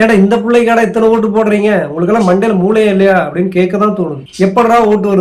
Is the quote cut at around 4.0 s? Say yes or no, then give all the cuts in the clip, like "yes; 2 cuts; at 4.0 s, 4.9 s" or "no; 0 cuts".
no; 0 cuts